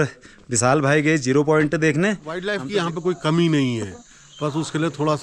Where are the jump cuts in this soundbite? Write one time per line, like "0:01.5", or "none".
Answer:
0:02.8